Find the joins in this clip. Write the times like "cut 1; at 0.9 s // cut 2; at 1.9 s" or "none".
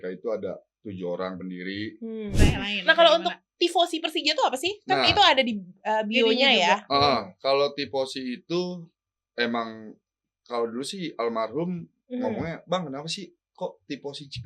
cut 1; at 2.4 s